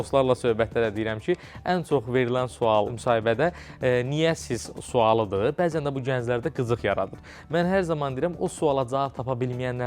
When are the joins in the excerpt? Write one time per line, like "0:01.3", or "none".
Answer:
0:02.9